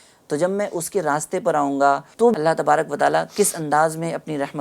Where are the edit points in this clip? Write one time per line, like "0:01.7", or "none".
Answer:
0:02.3